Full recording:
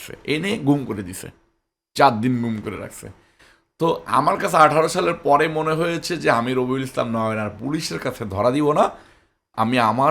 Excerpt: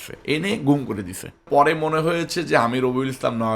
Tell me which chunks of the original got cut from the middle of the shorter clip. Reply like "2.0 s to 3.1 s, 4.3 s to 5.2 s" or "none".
1.4 s to 5.2 s